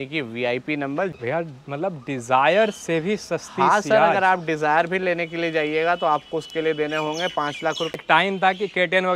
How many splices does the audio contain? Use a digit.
2